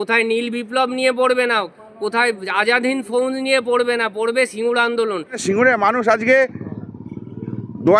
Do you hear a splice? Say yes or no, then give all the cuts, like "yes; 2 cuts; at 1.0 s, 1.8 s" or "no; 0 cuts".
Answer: yes; 1 cut; at 5.4 s